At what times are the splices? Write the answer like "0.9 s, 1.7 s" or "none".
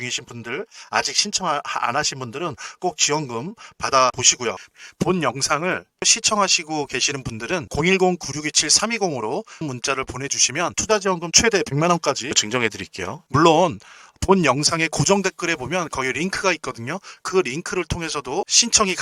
none